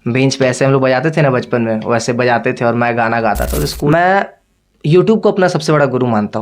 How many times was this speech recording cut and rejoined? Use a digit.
1